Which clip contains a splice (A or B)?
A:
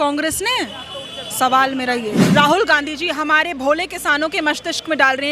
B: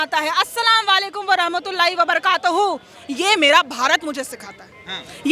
A